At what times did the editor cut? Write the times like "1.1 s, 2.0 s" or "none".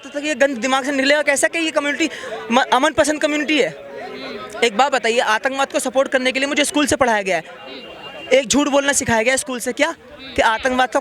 none